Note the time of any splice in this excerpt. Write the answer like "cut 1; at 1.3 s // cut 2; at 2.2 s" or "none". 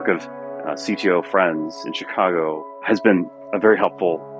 cut 1; at 2.7 s